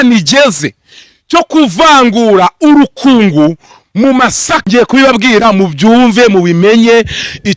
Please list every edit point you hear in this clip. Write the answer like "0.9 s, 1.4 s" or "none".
4.5 s